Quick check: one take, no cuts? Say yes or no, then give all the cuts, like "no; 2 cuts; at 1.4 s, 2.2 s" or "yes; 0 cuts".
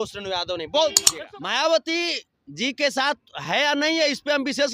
no; 1 cut; at 1.1 s